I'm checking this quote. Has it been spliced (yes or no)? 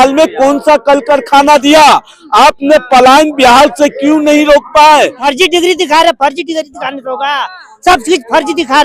yes